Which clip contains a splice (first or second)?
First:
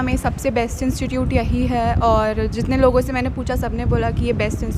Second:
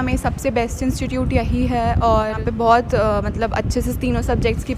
second